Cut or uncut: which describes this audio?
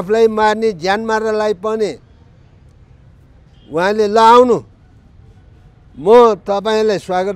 uncut